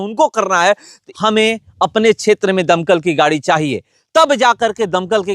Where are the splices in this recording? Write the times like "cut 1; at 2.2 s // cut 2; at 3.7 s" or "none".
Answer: cut 1; at 1.0 s